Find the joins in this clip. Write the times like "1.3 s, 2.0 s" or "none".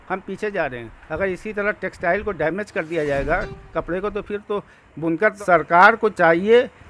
5.4 s